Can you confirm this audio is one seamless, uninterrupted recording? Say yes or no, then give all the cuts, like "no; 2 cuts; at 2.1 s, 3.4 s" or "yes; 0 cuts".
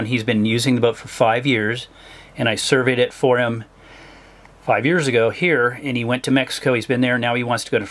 yes; 0 cuts